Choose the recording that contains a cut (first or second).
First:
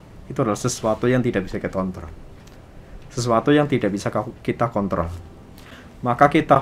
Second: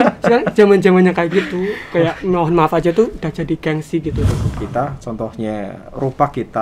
second